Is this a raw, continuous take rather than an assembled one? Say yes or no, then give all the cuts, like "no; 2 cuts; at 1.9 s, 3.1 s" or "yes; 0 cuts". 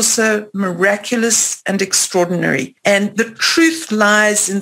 no; 1 cut; at 2.7 s